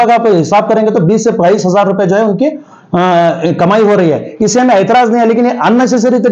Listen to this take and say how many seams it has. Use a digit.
0